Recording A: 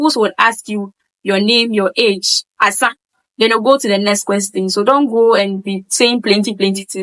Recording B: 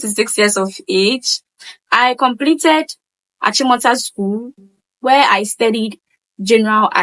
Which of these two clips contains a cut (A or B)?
B